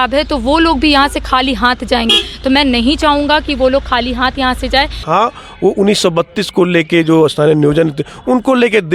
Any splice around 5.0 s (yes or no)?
yes